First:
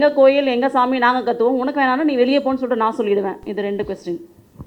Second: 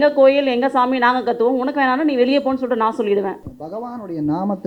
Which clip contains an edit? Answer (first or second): second